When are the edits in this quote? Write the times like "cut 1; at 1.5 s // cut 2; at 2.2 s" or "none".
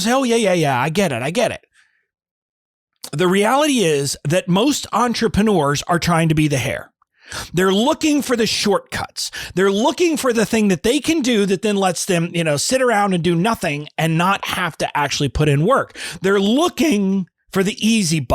cut 1; at 17.4 s